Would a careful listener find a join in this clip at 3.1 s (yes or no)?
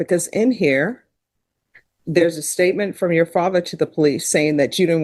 no